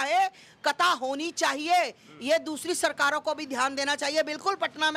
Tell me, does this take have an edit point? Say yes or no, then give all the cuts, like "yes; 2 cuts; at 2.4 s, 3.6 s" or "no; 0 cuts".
no; 0 cuts